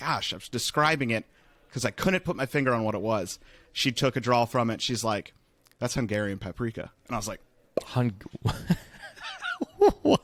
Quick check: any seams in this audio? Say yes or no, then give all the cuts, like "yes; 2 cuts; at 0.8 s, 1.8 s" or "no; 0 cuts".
no; 0 cuts